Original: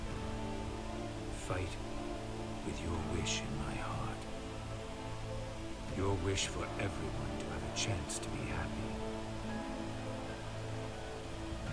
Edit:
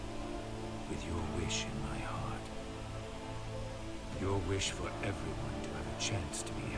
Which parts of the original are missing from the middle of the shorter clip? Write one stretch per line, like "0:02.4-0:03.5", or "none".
none